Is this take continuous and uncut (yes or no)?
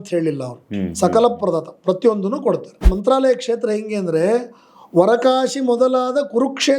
no